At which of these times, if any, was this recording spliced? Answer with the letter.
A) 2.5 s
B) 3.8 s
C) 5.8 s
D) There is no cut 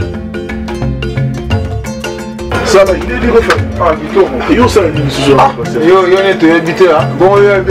D